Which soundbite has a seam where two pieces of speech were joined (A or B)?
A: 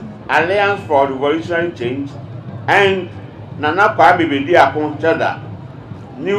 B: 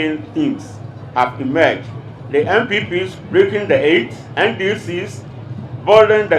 B